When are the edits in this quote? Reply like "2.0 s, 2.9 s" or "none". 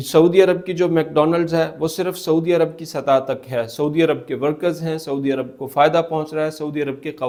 none